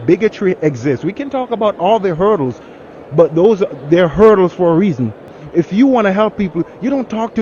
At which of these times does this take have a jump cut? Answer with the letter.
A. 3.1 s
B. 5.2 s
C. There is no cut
B